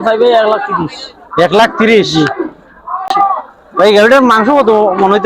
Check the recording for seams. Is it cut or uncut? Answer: cut